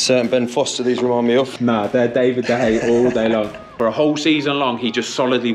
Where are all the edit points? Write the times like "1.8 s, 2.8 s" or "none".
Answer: 1.5 s, 3.7 s